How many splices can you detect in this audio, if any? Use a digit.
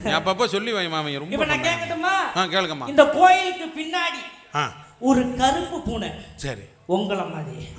0